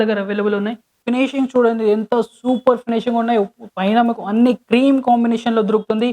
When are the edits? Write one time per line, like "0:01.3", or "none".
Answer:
0:00.9